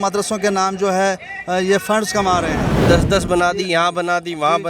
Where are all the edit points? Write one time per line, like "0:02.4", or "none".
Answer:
0:02.8